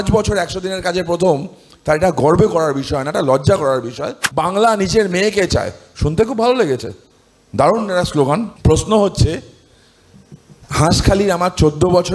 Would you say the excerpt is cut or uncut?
cut